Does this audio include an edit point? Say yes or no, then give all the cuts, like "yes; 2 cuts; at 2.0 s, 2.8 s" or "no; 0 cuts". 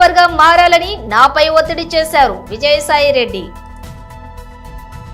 yes; 1 cut; at 3.5 s